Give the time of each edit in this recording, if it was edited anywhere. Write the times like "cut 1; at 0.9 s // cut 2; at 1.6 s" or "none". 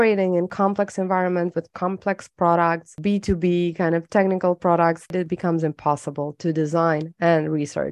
cut 1; at 2.9 s // cut 2; at 5.1 s